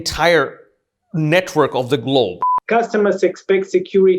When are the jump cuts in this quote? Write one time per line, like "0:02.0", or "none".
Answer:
0:02.5